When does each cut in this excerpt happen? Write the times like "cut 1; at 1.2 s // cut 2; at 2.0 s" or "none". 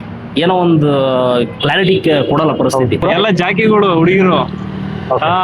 cut 1; at 3.0 s // cut 2; at 4.5 s

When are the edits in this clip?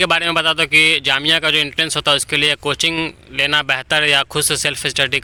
none

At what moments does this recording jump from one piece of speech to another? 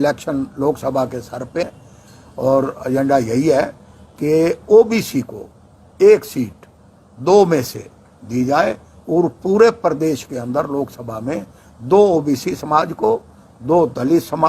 cut 1; at 1.7 s

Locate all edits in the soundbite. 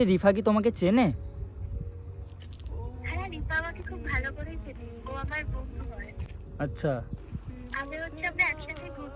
none

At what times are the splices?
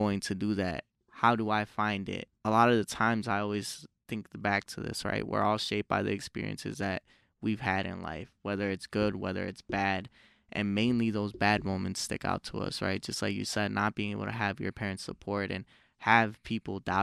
cut 1; at 2.3 s

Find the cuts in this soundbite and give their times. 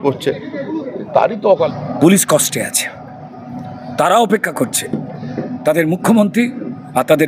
cut 1; at 1.7 s

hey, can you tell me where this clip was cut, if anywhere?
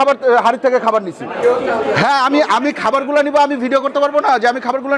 cut 1; at 1.3 s

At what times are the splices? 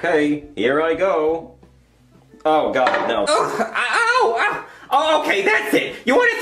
cut 1; at 3.3 s

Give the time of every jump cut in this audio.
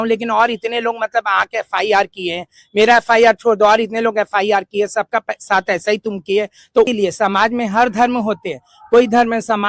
cut 1; at 6.9 s

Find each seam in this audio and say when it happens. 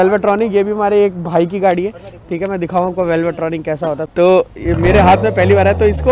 cut 1; at 4.1 s

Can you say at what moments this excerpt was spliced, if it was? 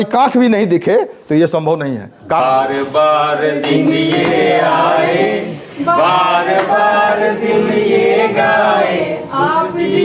cut 1; at 2.4 s

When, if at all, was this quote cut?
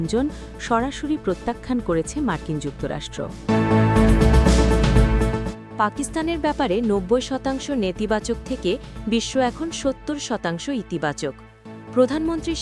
cut 1; at 3.3 s // cut 2; at 5.5 s

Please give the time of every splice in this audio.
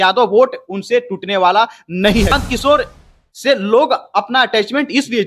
cut 1; at 2.3 s

